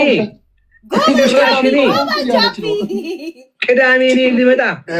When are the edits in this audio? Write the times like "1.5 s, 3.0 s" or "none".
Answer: none